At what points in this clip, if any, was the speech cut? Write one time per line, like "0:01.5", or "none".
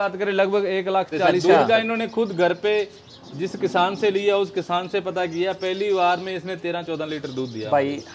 0:01.4